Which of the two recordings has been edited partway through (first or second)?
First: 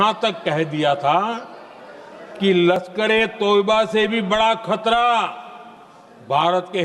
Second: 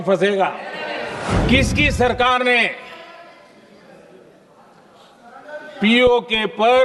second